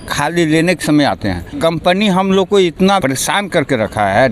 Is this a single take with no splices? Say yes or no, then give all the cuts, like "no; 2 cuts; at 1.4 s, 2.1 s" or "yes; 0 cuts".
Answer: no; 2 cuts; at 1.5 s, 3.0 s